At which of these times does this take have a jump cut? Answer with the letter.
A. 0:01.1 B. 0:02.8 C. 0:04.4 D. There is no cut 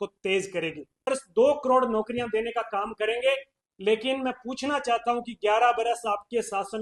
A